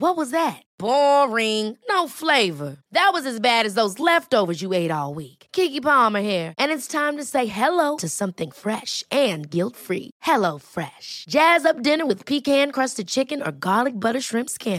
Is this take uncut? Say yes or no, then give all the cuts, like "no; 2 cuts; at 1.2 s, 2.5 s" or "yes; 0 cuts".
yes; 0 cuts